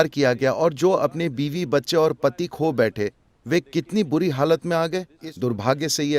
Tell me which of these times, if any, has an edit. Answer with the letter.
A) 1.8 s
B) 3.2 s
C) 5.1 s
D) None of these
C